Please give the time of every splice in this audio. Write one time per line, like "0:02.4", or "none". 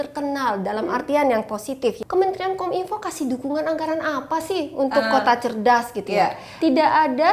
0:02.0
0:06.5